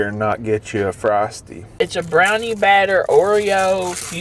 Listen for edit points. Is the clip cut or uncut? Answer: cut